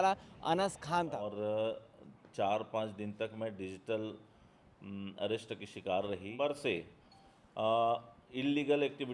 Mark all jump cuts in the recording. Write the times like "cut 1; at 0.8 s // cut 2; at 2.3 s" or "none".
cut 1; at 1.3 s // cut 2; at 6.3 s